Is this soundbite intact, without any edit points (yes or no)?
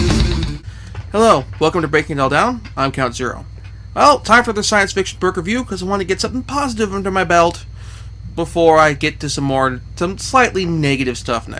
no